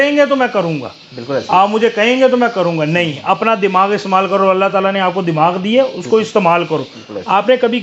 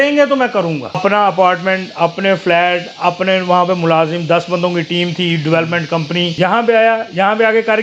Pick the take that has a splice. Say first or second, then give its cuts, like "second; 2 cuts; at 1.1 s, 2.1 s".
second; 2 cuts; at 1.0 s, 6.3 s